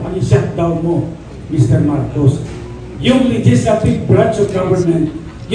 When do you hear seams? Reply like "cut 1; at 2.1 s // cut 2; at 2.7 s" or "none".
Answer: none

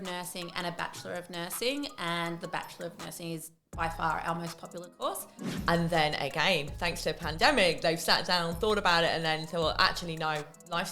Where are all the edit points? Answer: cut 1; at 5.5 s

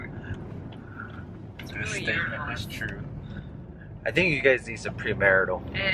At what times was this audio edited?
cut 1; at 2.5 s

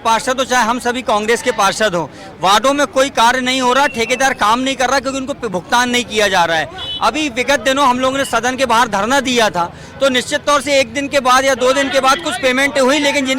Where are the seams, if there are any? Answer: none

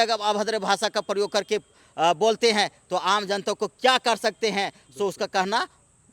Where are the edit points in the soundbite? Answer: none

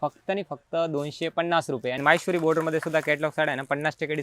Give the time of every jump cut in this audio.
cut 1; at 2.0 s

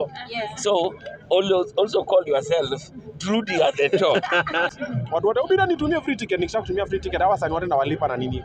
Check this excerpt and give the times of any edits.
cut 1; at 4.8 s

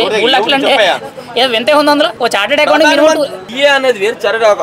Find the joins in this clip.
cut 1; at 2.1 s // cut 2; at 3.4 s

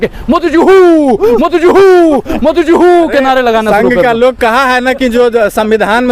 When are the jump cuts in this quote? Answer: none

